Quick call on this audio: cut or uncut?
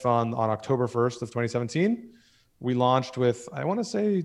uncut